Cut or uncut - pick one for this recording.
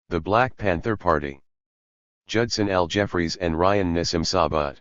cut